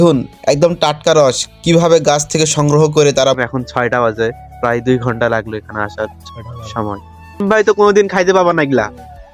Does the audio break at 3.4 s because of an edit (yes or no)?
yes